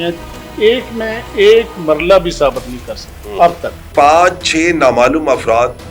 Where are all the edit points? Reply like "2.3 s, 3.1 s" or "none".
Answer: 3.9 s